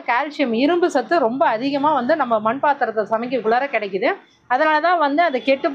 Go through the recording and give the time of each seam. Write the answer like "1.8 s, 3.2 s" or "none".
none